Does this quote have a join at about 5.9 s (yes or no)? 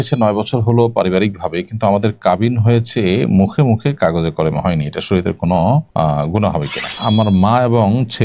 yes